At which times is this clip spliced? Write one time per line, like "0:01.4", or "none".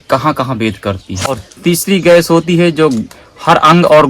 0:01.3